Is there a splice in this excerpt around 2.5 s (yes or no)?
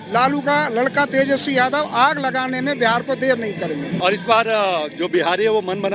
no